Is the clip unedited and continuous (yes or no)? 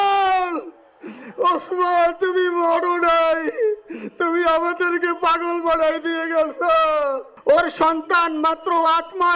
no